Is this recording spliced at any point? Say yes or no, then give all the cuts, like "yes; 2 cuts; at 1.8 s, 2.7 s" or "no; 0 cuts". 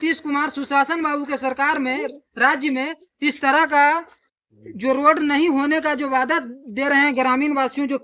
no; 0 cuts